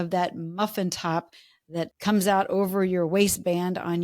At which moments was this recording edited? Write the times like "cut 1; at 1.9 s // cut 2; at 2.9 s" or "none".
cut 1; at 1.9 s